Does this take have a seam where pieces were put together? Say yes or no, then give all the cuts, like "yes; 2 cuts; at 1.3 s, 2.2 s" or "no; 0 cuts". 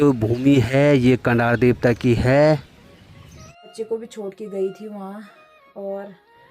yes; 1 cut; at 3.7 s